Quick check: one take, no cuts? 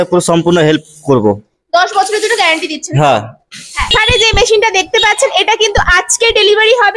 no; 1 cut; at 3.9 s

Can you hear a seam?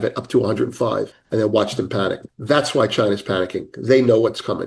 yes; 2 cuts; at 1.2 s, 2.3 s

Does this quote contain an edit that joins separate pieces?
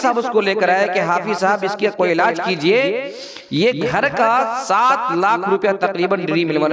no; 0 cuts

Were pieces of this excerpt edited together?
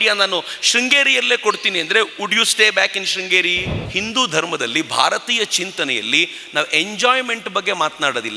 yes; 1 cut; at 3.8 s

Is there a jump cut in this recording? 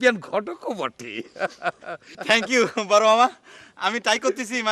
yes; 1 cut; at 2.1 s

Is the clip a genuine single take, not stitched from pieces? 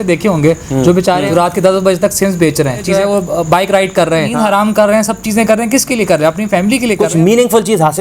no; 4 cuts; at 1.2 s, 3.0 s, 4.3 s, 7.3 s

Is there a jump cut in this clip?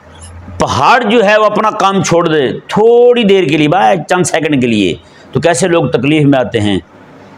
no; 0 cuts

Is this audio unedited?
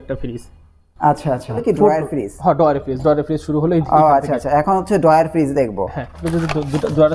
no; 2 cuts; at 1.6 s, 6.2 s

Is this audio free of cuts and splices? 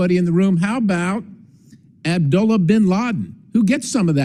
yes; 0 cuts

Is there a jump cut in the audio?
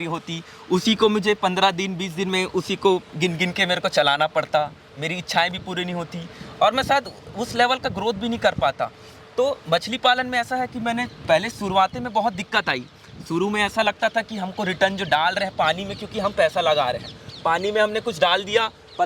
no; 0 cuts

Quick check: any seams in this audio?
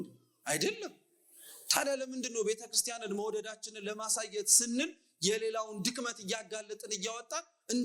no; 0 cuts

